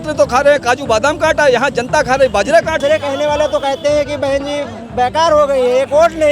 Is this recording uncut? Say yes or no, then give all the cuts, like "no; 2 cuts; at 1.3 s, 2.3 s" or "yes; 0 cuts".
no; 1 cut; at 2.8 s